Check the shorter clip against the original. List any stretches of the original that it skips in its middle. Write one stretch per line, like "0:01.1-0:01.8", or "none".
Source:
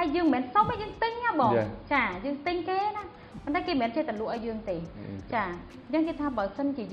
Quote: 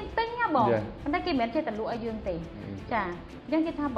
0:01.8-0:03.3

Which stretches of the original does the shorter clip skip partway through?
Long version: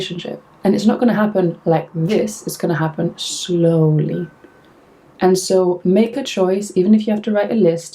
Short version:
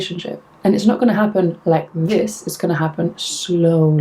none

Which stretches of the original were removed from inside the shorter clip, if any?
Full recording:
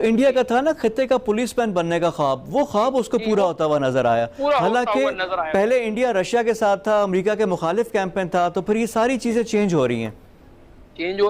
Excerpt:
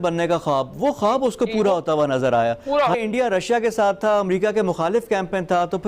0:04.7-0:05.8

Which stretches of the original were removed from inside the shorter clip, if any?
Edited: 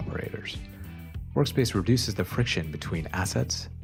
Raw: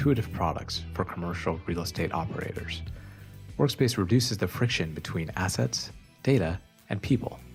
none

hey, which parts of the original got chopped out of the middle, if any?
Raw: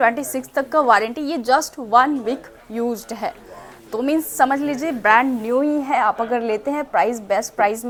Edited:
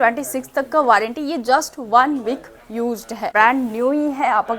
0:03.3-0:05.0

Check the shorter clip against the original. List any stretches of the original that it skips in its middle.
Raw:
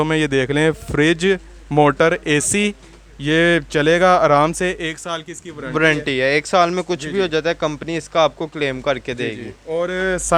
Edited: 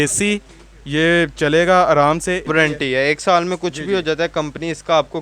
0:04.8-0:05.7

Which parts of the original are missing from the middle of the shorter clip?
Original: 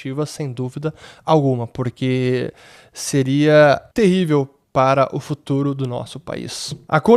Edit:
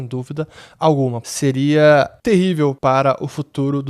0:01.7-0:03.0
0:04.5-0:04.7

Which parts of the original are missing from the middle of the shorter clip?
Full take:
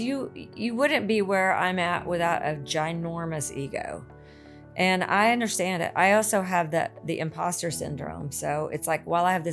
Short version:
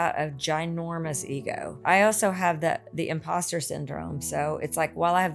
0:04.1-0:05.9

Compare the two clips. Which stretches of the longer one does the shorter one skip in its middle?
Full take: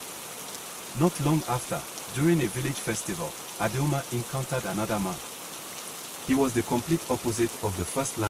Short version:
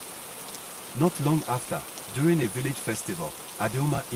none

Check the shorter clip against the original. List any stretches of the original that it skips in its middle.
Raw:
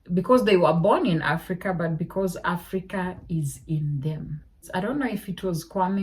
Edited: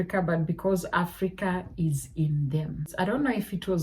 0:04.3-0:04.6

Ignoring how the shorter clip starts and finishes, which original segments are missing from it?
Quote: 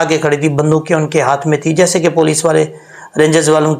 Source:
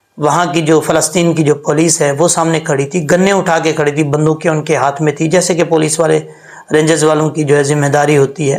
none

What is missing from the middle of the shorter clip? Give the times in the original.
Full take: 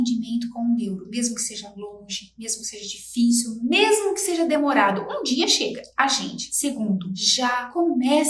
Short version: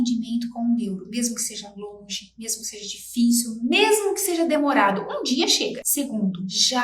0:05.8-0:06.5

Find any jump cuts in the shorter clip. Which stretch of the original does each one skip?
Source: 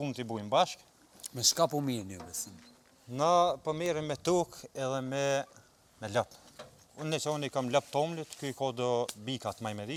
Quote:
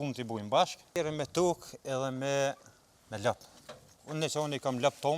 0:00.9-0:03.8

